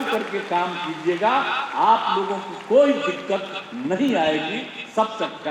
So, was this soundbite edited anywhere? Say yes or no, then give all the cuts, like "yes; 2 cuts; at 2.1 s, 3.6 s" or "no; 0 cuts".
no; 0 cuts